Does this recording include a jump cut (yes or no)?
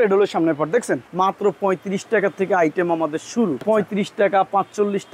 yes